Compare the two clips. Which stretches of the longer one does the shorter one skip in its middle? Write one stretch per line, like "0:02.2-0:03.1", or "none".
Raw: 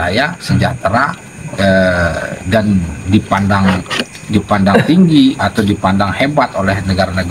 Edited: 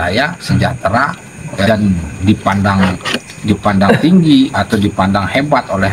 0:01.7-0:02.5